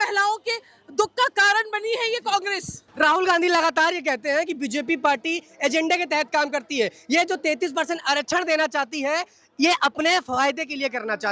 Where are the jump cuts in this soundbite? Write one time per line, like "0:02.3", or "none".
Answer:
none